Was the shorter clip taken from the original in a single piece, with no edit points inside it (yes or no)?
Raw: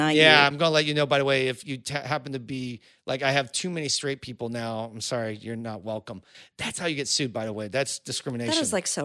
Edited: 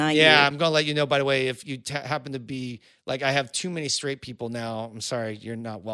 yes